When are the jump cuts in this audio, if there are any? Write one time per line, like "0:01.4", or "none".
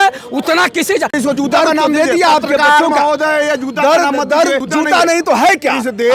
0:01.1
0:04.6